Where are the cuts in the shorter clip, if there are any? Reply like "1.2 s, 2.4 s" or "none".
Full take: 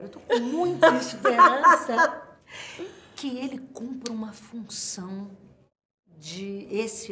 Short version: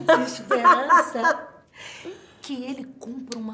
none